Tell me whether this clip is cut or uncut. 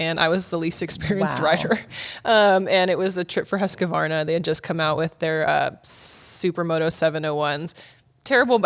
uncut